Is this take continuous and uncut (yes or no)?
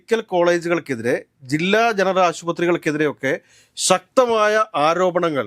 yes